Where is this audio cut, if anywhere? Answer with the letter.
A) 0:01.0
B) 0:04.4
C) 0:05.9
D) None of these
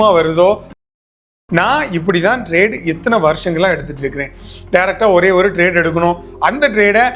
A